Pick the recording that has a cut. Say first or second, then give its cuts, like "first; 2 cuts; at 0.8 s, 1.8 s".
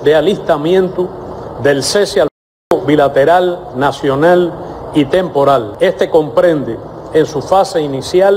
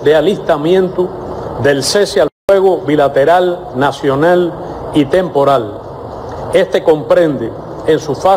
first; 1 cut; at 5.7 s